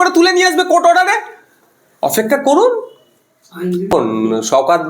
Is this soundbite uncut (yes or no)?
no